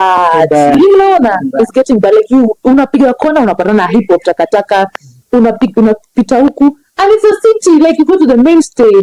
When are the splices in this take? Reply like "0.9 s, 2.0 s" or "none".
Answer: none